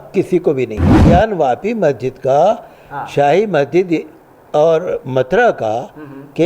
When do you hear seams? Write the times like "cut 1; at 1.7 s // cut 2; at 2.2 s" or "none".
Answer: cut 1; at 1.0 s